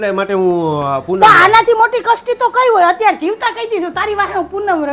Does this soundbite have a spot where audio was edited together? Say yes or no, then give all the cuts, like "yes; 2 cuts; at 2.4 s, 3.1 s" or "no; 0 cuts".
no; 0 cuts